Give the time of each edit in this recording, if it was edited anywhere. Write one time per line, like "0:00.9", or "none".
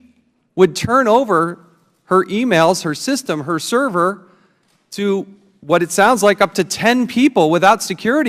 none